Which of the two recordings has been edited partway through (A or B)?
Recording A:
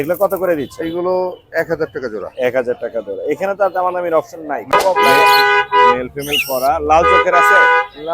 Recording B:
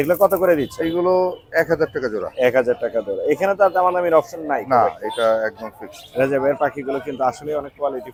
A